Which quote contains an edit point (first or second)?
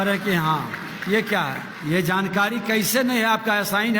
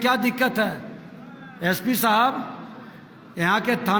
first